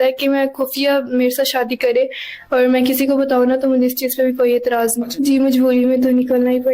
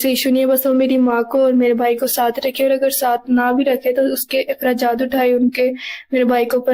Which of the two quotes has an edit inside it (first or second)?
first